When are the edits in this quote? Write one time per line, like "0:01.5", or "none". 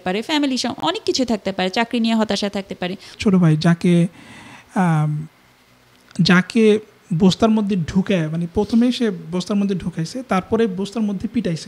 0:03.1